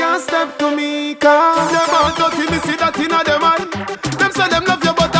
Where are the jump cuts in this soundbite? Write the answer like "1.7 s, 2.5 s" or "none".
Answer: none